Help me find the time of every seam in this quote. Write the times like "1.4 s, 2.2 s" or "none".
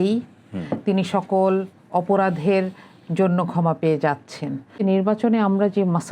4.7 s